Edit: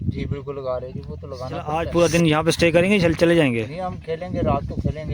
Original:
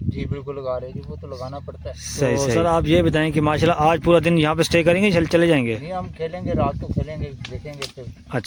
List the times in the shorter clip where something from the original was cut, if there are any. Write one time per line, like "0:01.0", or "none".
0:01.7